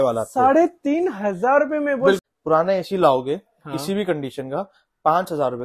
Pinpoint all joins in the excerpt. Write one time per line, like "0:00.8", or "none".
0:02.3